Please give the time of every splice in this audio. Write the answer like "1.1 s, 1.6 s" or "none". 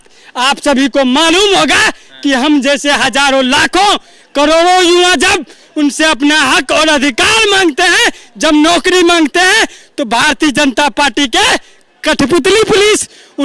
none